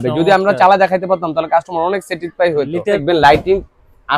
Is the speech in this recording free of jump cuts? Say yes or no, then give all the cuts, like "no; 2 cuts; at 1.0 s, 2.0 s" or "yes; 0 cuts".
no; 1 cut; at 3.0 s